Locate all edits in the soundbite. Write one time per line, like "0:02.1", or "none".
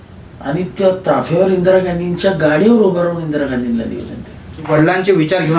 0:04.7

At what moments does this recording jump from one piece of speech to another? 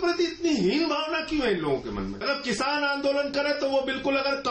0:02.1

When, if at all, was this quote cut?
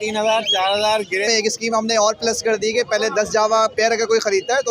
0:01.3

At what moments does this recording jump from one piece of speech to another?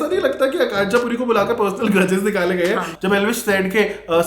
0:02.9

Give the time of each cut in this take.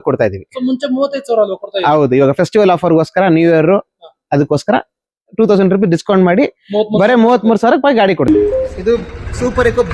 0:08.3

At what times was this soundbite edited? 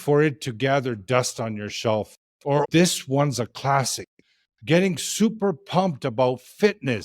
0:02.6

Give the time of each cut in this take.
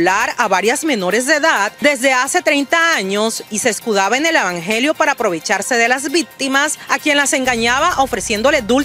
0:01.7
0:06.8

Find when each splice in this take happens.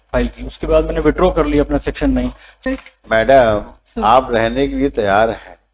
0:02.6

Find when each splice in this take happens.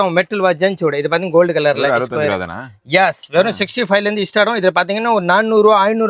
none

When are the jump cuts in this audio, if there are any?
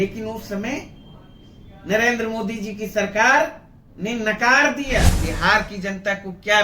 0:05.2

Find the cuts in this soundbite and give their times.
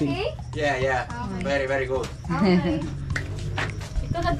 none

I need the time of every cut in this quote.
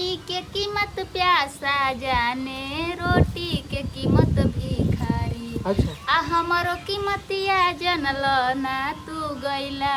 none

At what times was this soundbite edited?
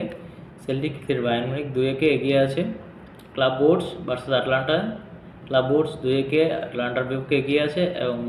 none

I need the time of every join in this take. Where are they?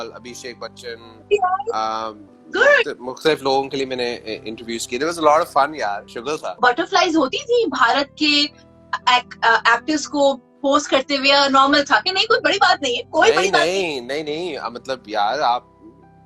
none

